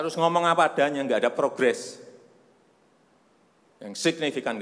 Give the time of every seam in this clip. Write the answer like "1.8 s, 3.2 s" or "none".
none